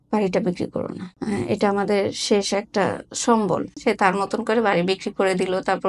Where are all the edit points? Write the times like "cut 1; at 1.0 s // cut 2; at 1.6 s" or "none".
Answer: cut 1; at 1.1 s // cut 2; at 3.8 s